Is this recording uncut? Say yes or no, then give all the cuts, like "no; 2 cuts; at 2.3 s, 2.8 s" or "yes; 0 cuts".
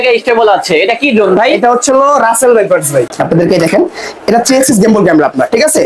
no; 1 cut; at 3.1 s